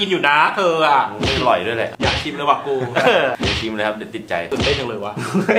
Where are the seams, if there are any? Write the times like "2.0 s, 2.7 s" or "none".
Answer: 1.9 s, 4.5 s